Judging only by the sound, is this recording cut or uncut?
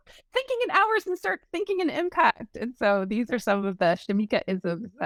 uncut